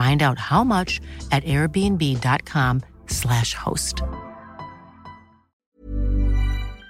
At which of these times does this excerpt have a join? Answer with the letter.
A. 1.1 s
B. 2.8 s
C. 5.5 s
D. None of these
C